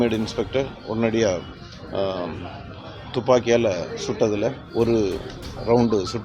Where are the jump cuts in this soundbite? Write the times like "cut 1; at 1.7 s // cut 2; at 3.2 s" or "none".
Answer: none